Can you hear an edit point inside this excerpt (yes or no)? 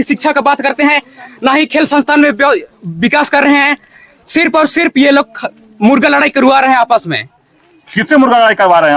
no